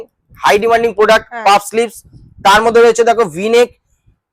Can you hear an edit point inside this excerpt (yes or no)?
no